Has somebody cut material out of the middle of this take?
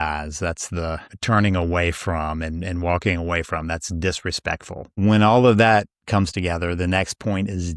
yes; 2 cuts; at 1.1 s, 4.8 s

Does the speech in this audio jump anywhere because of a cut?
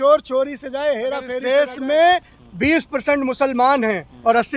yes; 1 cut; at 1.3 s

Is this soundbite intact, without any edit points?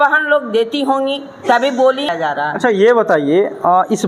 no; 1 cut; at 2.1 s

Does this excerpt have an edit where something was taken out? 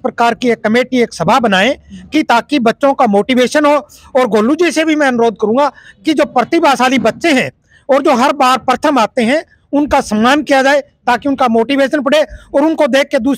no; 0 cuts

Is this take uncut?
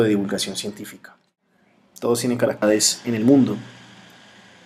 yes; 0 cuts

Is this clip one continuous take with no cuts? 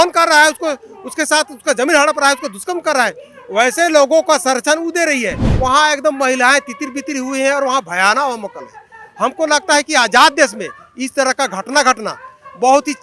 no; 1 cut; at 5.4 s

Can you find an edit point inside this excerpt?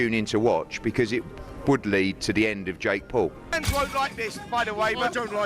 yes; 1 cut; at 3.6 s

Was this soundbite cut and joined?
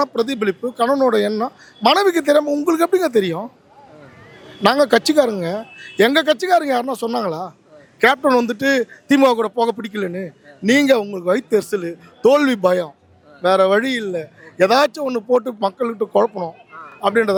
no; 0 cuts

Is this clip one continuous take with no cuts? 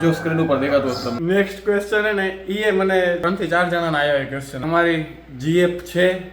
no; 3 cuts; at 1.1 s, 3.2 s, 4.6 s

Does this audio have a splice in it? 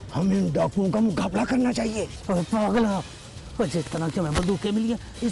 no; 0 cuts

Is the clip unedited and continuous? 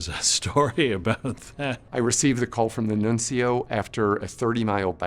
no; 1 cut; at 1.8 s

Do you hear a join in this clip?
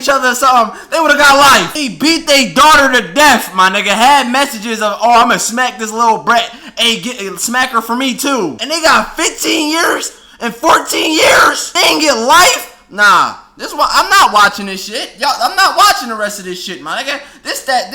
yes; 3 cuts; at 1.8 s, 8.6 s, 11.6 s

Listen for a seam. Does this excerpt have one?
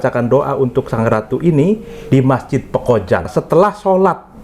yes; 1 cut; at 3.3 s

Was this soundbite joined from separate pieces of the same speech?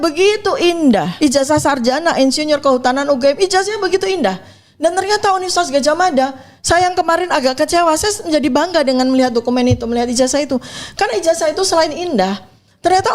yes; 1 cut; at 1.1 s

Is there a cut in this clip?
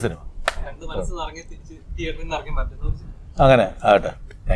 no; 0 cuts

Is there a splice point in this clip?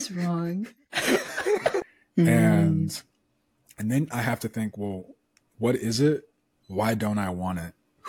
yes; 1 cut; at 1.8 s

